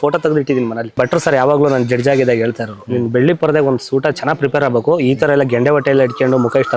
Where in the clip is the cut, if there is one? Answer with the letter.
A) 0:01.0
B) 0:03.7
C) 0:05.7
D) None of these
A